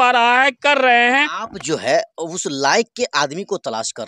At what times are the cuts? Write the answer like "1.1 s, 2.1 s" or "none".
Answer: 1.4 s